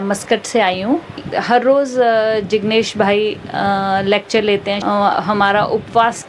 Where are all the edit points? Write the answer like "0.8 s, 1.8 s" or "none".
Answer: 1.2 s, 4.8 s